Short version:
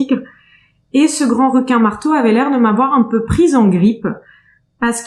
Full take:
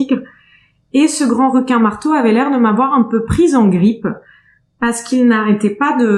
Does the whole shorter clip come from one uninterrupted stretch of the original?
yes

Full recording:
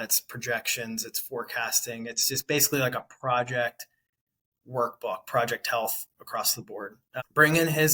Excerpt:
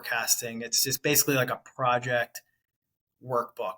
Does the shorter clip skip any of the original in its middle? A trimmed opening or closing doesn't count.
no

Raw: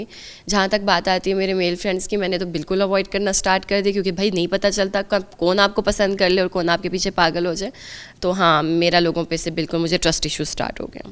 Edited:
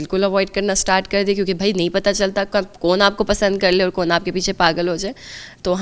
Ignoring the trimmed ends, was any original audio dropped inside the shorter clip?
no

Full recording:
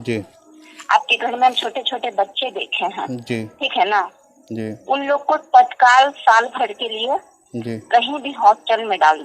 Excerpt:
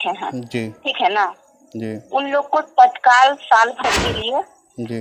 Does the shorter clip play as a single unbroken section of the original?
yes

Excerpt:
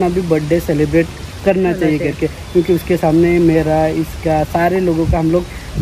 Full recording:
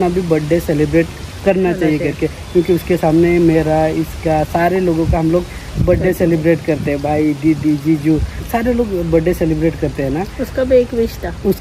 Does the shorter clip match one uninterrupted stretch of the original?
yes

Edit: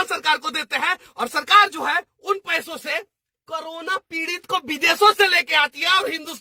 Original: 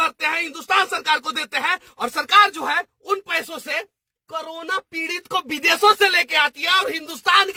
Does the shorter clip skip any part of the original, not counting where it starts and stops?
no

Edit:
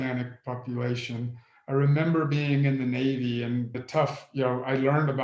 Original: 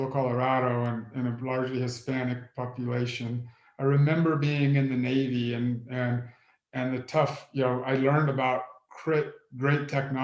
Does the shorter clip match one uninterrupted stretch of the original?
no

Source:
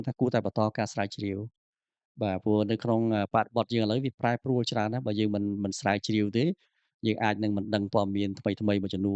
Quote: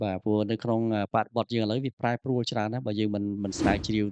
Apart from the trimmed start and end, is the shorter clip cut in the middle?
no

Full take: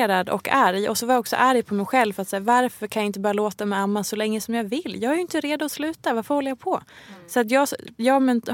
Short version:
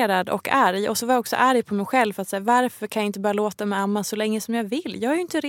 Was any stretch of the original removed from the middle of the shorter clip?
no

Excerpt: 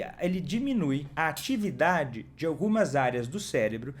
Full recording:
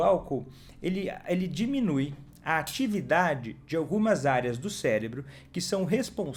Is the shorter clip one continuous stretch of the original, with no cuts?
no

